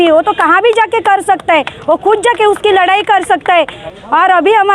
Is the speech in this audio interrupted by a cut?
yes; 1 cut; at 3.8 s

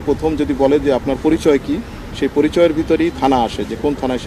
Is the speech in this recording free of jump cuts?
yes; 0 cuts

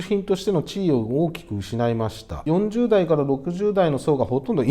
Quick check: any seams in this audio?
no; 0 cuts

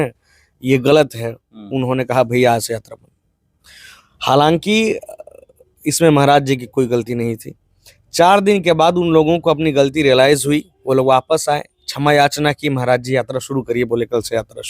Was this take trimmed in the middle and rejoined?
no; 0 cuts

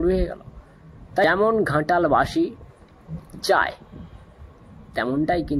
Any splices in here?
yes; 1 cut; at 1.2 s

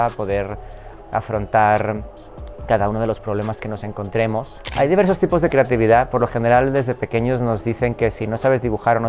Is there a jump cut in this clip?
yes; 1 cut; at 4.6 s

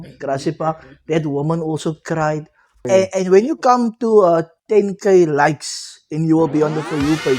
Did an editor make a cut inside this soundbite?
yes; 1 cut; at 2.8 s

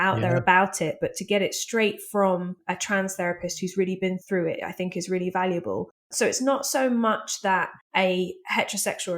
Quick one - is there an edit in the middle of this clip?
yes; 4 cuts; at 2.6 s, 4.2 s, 6.1 s, 7.8 s

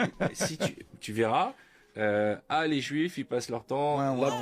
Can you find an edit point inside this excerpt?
no; 0 cuts

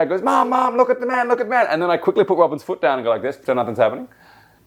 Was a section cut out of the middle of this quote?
no; 0 cuts

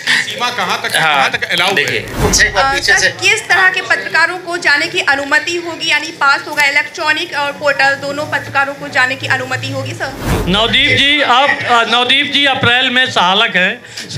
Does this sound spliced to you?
yes; 2 cuts; at 2.1 s, 10.3 s

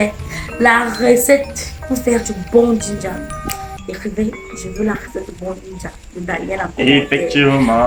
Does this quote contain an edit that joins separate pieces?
no; 0 cuts

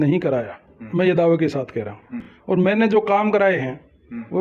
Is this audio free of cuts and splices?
yes; 0 cuts

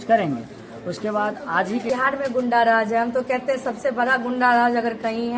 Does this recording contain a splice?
yes; 1 cut; at 1.9 s

